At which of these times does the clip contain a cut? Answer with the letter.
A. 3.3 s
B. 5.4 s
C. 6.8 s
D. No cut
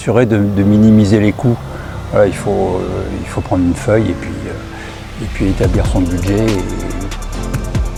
D